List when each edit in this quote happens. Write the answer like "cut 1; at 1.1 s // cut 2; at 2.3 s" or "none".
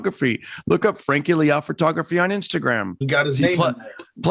cut 1; at 3.0 s

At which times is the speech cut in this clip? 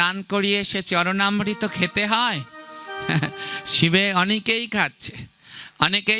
none

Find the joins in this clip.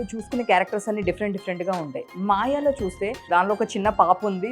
cut 1; at 3.2 s

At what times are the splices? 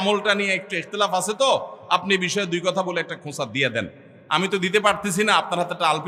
none

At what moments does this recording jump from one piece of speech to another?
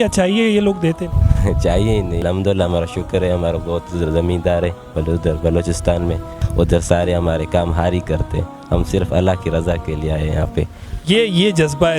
cut 1; at 2.2 s // cut 2; at 6.4 s // cut 3; at 10.8 s

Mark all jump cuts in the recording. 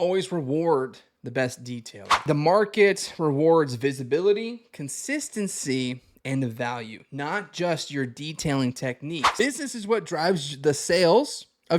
cut 1; at 2.2 s // cut 2; at 9.4 s

